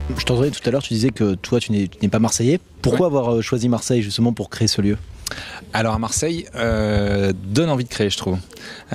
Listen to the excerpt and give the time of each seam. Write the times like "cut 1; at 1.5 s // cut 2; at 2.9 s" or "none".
none

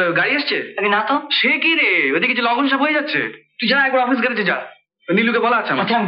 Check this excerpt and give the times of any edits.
none

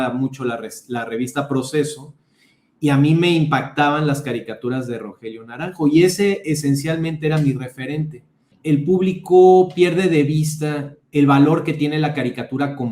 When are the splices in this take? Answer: cut 1; at 8.5 s

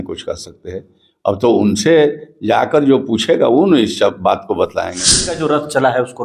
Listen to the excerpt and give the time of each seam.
cut 1; at 5.2 s

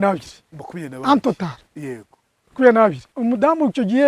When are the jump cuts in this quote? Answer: cut 1; at 3.1 s

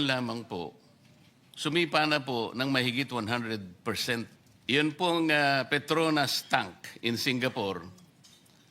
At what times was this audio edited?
cut 1; at 4.4 s

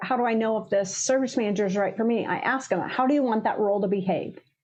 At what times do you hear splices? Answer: none

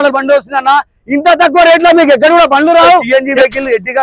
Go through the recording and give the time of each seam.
cut 1; at 3.1 s

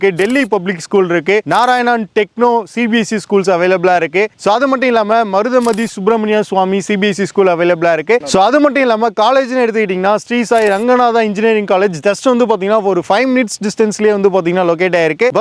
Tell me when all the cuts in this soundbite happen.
none

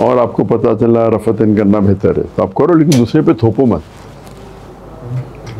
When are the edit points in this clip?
none

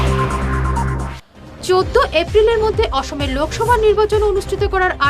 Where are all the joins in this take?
cut 1; at 1.1 s

